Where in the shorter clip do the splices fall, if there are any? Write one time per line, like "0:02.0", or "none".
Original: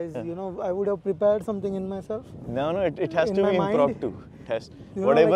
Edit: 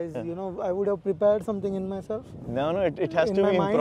none